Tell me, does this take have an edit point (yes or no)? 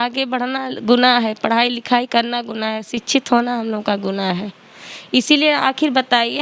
no